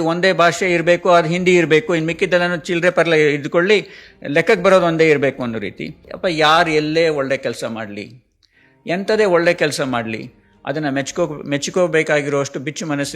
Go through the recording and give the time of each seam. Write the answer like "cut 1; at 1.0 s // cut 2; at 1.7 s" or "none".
cut 1; at 6.1 s